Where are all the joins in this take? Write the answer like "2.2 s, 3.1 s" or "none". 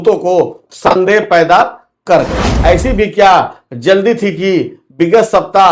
2.5 s